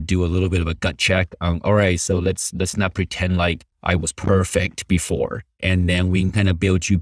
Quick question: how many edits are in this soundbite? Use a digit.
1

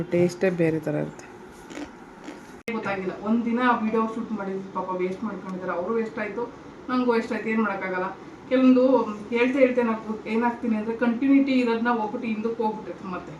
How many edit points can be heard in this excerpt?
1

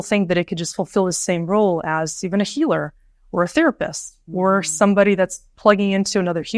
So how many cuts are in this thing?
0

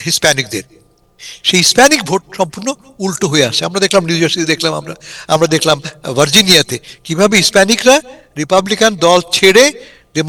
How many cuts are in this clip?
0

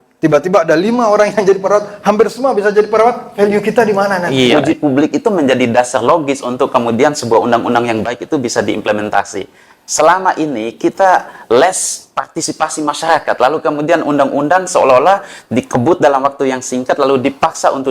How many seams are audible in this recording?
1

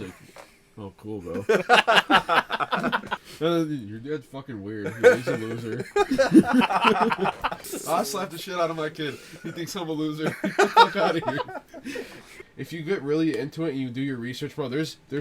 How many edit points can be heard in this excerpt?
3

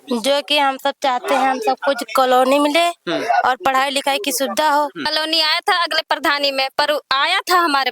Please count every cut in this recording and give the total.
1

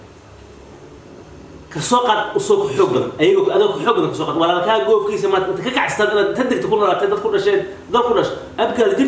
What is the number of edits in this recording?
1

